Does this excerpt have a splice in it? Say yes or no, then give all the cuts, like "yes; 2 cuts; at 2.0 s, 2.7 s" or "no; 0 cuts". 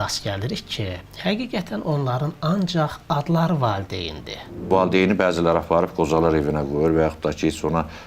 yes; 1 cut; at 4.7 s